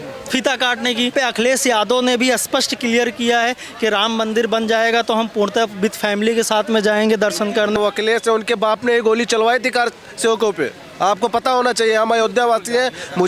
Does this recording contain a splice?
yes; 2 cuts; at 1.1 s, 7.8 s

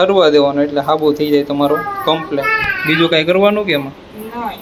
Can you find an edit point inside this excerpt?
no; 0 cuts

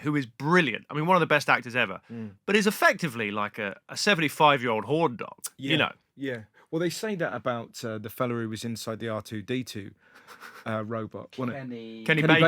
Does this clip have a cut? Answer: no; 0 cuts

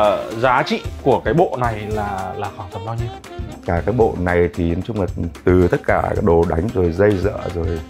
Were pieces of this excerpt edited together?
no; 0 cuts

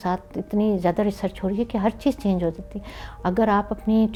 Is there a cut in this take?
no; 0 cuts

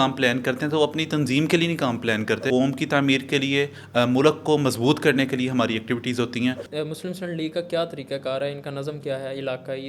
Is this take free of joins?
no; 2 cuts; at 2.4 s, 6.6 s

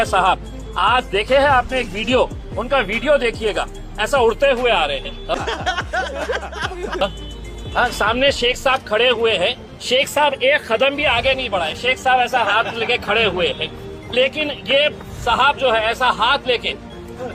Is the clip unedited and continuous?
yes; 0 cuts

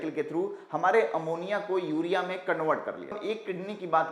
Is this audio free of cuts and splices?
no; 1 cut; at 3.2 s

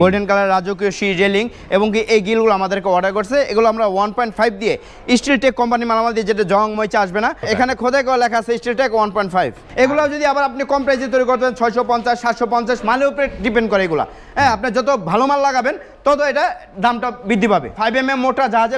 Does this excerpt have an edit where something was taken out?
yes; 3 cuts; at 7.4 s, 9.6 s, 17.7 s

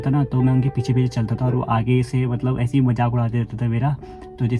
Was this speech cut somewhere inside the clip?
no; 0 cuts

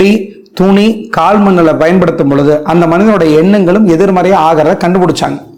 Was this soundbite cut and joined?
no; 0 cuts

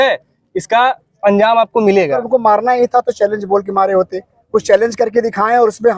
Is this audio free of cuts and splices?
no; 1 cut; at 2.2 s

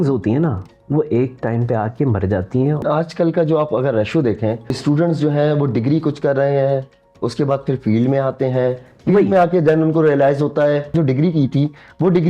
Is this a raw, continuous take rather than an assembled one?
no; 3 cuts; at 2.8 s, 4.7 s, 10.9 s

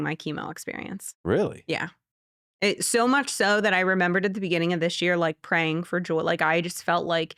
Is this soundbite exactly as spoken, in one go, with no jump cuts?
yes; 0 cuts

